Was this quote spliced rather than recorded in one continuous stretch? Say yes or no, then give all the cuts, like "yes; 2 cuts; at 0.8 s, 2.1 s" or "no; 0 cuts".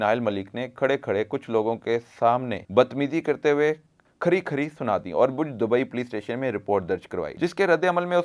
yes; 2 cuts; at 2.6 s, 7.3 s